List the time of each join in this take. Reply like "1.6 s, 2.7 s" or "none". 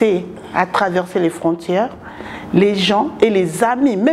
none